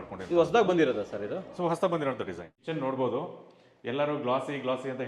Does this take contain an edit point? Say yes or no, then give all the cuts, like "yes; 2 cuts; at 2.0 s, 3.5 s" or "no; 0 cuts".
yes; 1 cut; at 2.6 s